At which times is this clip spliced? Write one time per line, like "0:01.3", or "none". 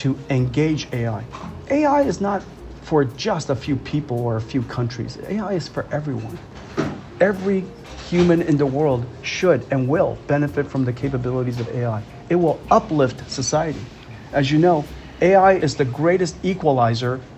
0:15.6